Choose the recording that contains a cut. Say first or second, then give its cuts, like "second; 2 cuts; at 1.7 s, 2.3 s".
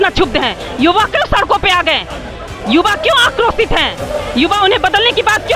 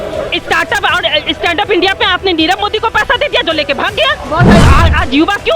second; 1 cut; at 4.6 s